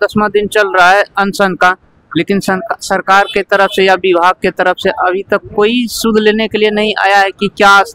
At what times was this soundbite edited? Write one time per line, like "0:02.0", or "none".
none